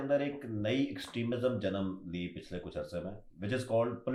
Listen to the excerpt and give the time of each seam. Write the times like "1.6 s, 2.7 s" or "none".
none